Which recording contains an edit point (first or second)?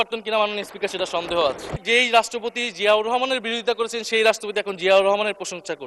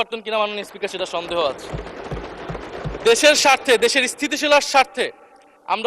first